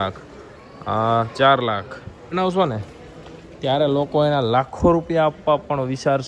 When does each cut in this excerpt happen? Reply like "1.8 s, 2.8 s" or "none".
2.3 s